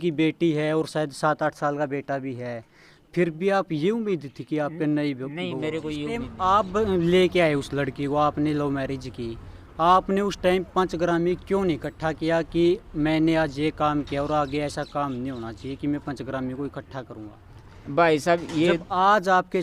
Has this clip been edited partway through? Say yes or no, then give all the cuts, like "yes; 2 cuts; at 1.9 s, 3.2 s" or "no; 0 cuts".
yes; 1 cut; at 6.3 s